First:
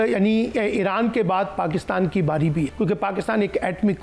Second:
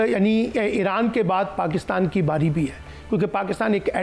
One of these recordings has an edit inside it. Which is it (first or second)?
first